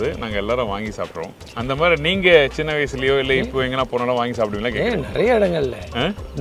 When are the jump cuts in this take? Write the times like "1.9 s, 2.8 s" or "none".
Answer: 1.6 s

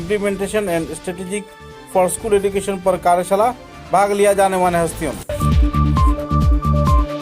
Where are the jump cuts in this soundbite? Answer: 5.2 s

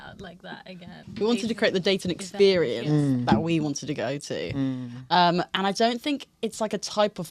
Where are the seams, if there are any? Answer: 1.0 s

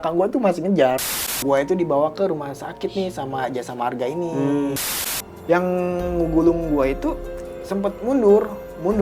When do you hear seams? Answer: 1.2 s, 4.9 s

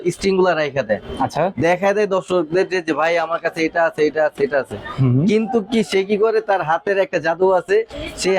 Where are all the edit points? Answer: none

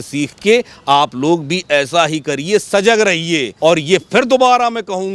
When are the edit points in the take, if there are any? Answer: 3.5 s

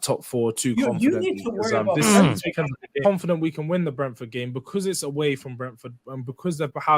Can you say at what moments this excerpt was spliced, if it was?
2.8 s

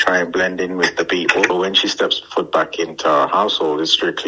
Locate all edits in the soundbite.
1.5 s

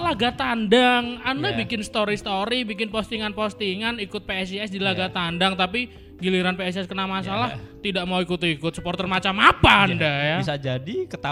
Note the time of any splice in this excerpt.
none

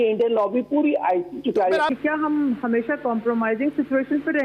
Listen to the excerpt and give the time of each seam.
1.9 s

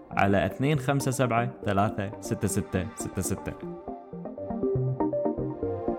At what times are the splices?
3.4 s

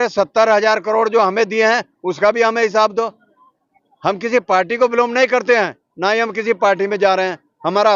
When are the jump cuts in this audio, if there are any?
none

